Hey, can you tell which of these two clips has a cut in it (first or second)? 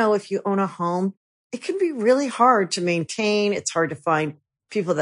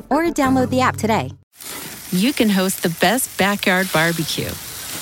second